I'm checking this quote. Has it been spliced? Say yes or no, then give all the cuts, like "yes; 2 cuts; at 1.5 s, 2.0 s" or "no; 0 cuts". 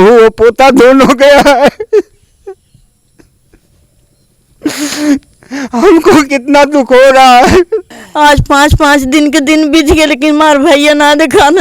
yes; 1 cut; at 8.0 s